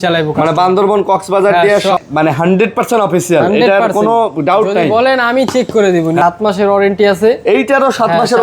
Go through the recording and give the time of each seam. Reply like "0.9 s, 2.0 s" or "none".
2.0 s, 6.2 s